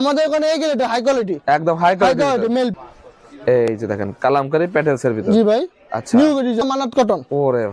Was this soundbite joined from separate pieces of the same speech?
yes; 2 cuts; at 2.7 s, 6.6 s

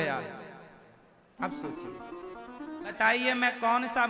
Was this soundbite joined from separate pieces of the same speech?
yes; 1 cut; at 3.0 s

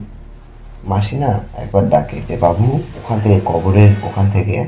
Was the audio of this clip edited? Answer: yes; 1 cut; at 2.9 s

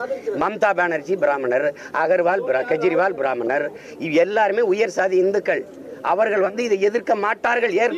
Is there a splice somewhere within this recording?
no; 0 cuts

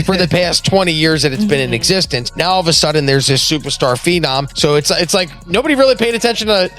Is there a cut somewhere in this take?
yes; 2 cuts; at 2.2 s, 4.5 s

